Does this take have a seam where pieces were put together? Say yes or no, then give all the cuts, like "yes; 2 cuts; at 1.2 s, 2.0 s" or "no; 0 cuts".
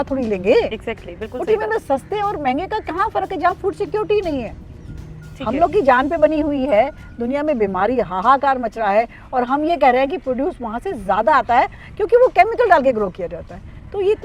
no; 0 cuts